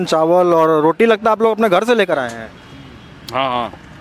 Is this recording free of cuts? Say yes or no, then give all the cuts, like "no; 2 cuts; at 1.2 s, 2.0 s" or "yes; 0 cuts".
yes; 0 cuts